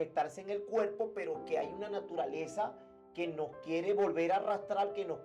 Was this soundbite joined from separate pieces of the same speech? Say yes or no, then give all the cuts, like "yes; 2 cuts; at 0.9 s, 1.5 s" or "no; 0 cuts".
no; 0 cuts